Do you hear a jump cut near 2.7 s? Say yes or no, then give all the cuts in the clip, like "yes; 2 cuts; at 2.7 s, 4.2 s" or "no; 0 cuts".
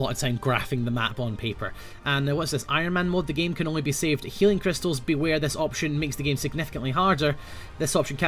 yes; 1 cut; at 2.7 s